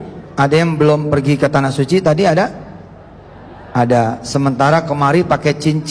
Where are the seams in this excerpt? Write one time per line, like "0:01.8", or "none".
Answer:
none